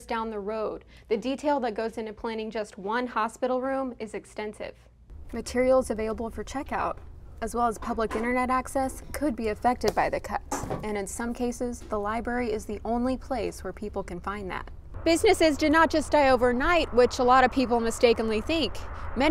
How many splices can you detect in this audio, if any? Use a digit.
2